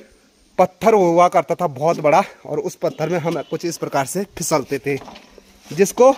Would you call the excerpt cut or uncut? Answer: uncut